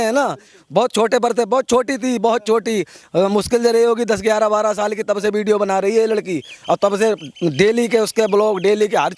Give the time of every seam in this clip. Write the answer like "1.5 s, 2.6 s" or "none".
none